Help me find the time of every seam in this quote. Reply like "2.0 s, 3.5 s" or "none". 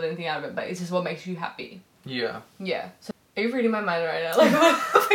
3.0 s